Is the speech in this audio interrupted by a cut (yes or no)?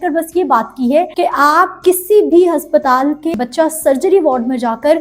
yes